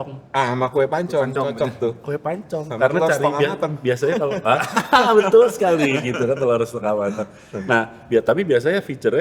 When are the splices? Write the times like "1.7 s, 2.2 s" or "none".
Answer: none